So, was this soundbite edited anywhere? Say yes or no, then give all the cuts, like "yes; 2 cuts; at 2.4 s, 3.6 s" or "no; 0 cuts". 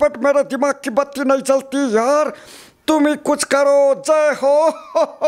no; 0 cuts